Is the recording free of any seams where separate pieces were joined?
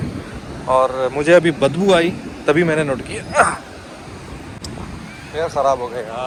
yes; 0 cuts

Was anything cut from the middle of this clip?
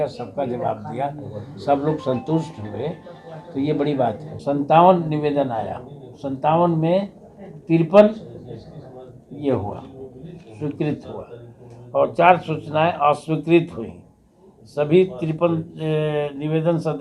yes; 1 cut; at 4.3 s

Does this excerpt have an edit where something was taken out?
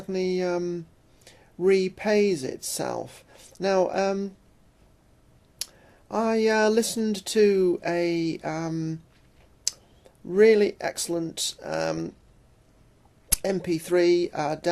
no; 0 cuts

